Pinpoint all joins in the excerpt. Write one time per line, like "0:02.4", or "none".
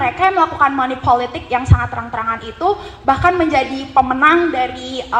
none